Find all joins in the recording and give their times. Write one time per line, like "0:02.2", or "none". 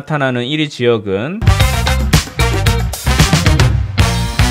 0:01.4